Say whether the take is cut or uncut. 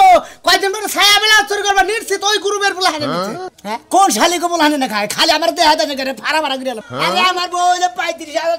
cut